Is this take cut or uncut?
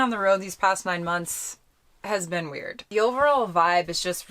cut